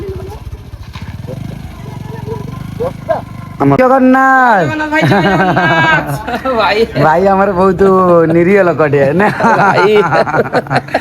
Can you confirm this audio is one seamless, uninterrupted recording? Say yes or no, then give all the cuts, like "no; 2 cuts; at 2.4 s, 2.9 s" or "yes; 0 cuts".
no; 1 cut; at 3.8 s